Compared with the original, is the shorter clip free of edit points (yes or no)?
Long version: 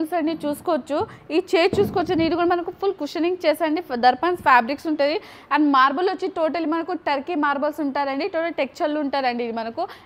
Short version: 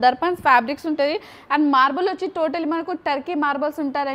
yes